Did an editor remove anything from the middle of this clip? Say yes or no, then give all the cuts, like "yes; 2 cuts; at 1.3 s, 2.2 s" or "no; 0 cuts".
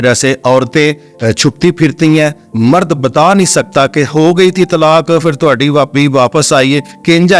no; 0 cuts